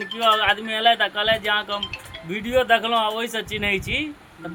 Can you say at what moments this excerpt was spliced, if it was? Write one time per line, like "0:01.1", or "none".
none